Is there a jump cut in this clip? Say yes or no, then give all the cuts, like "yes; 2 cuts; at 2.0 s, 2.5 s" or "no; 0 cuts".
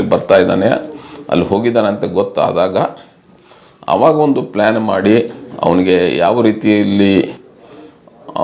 no; 0 cuts